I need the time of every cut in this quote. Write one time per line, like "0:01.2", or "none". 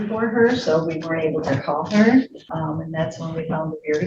0:02.5